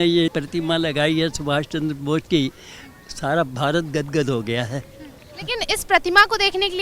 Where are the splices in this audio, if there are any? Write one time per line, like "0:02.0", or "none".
none